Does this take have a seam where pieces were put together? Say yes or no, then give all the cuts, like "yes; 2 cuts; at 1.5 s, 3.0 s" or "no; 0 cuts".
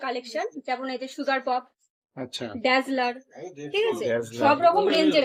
no; 0 cuts